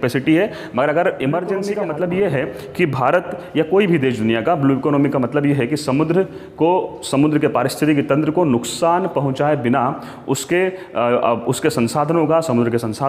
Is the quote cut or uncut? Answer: cut